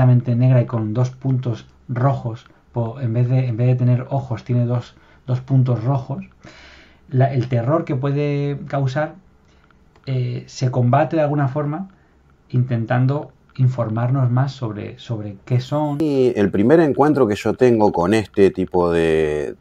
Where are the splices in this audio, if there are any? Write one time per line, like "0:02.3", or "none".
0:16.0